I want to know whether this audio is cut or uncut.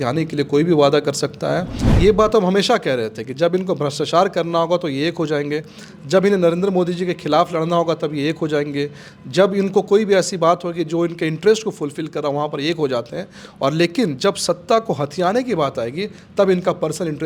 cut